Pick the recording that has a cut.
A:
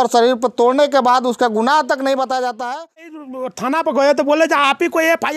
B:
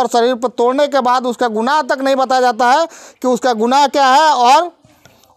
A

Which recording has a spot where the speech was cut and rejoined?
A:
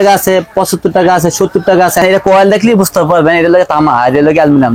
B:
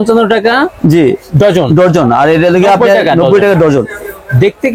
A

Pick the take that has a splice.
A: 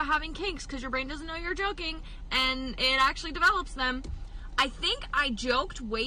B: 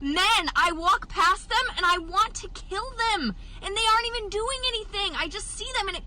B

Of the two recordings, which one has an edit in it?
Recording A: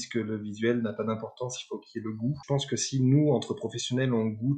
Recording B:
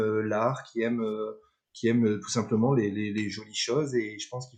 A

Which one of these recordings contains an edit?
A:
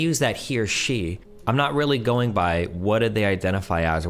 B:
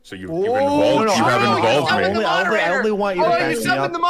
A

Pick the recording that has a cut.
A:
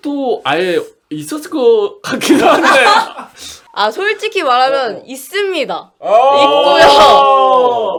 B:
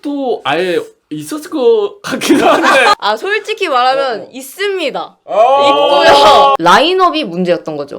B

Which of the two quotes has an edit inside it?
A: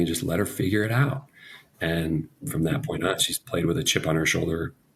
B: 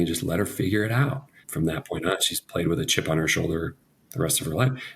B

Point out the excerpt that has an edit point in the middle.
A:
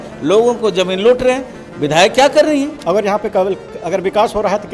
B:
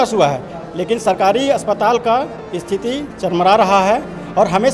A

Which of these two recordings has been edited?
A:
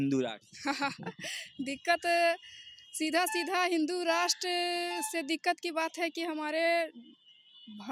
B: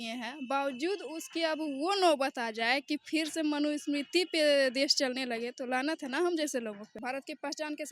B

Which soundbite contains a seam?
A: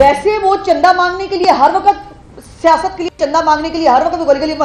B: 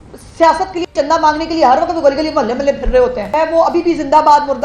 B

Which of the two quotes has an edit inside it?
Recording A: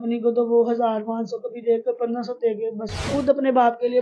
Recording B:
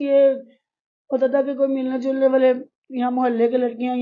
A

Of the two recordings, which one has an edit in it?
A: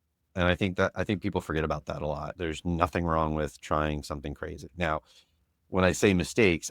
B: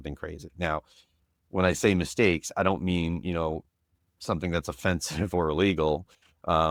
A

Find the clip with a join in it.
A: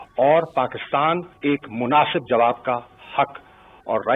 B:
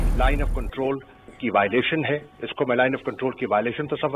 A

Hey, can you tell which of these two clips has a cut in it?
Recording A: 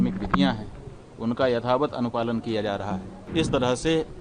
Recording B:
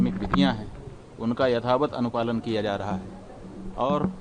A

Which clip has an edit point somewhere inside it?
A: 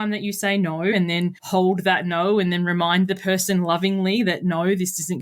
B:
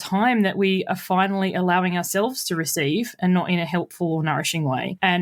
A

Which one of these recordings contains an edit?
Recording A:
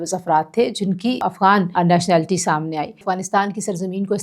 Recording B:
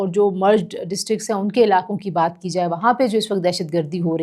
A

